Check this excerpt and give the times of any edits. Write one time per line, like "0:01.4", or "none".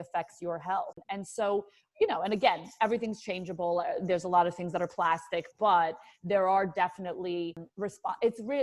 0:01.0
0:07.6

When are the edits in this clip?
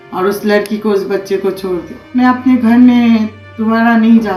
0:02.0

